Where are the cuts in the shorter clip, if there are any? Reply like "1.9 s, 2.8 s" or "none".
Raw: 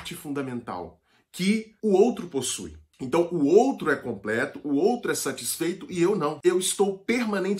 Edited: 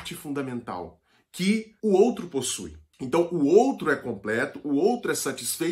none